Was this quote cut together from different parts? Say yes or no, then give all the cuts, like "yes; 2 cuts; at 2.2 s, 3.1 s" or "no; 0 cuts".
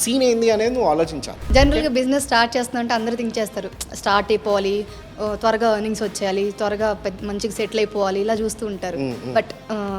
yes; 1 cut; at 1.4 s